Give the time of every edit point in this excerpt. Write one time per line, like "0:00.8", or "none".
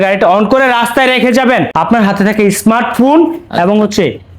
0:01.7